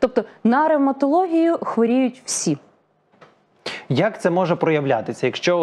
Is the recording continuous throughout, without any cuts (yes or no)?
yes